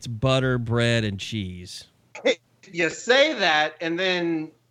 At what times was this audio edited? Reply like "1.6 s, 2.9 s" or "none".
2.6 s